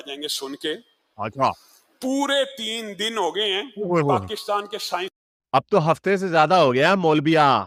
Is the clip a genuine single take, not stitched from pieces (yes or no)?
yes